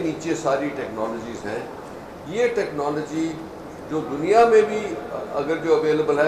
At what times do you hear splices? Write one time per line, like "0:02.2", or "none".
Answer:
none